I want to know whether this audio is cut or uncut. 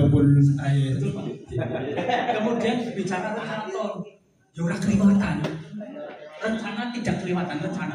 uncut